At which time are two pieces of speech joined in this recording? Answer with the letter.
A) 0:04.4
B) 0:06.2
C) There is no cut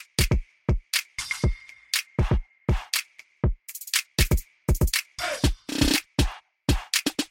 C